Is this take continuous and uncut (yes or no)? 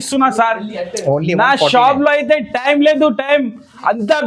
yes